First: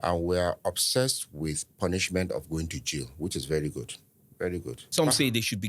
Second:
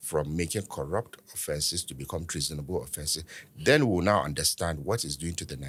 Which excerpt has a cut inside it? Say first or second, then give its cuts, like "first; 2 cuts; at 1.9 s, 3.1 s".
first; 1 cut; at 4.8 s